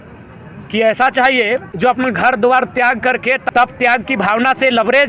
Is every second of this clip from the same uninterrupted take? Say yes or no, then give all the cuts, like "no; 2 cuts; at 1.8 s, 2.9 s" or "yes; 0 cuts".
no; 2 cuts; at 1.7 s, 3.4 s